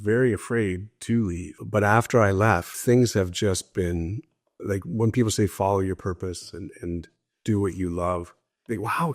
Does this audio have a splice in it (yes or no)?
yes